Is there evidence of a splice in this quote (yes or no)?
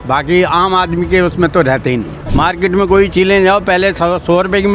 yes